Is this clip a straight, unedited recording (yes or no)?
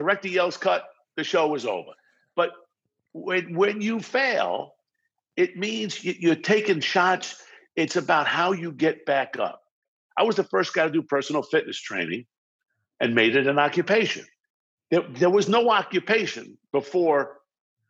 no